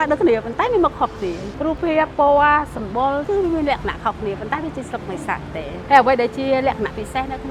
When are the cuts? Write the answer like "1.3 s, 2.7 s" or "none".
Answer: none